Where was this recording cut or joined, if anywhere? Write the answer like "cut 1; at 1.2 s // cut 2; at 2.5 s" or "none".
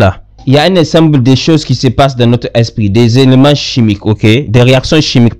none